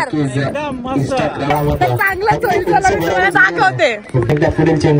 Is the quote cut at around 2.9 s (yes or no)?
no